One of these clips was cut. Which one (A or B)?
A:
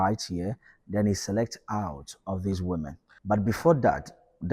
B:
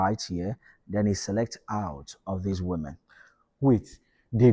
A